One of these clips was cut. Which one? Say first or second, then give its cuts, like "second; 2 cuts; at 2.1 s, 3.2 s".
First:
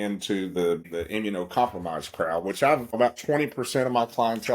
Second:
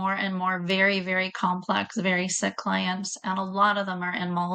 first; 2 cuts; at 0.9 s, 3.0 s